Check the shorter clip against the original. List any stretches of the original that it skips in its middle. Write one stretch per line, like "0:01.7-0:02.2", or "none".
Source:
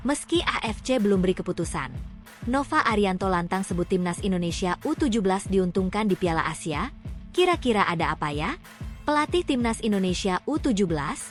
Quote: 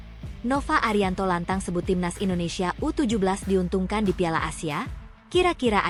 none